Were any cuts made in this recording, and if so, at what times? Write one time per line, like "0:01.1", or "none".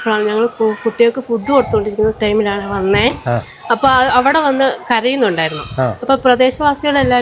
none